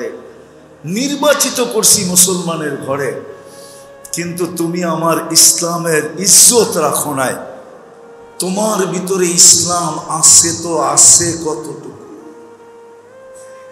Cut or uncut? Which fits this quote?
cut